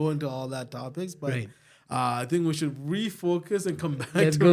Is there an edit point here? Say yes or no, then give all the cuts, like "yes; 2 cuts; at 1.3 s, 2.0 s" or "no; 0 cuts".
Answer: no; 0 cuts